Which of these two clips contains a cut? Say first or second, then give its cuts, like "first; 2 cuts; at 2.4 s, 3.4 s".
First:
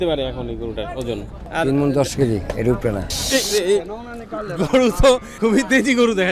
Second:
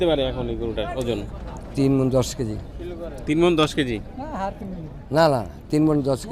first; 3 cuts; at 1.3 s, 3.1 s, 5.3 s